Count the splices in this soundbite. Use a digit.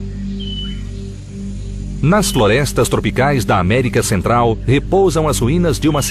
1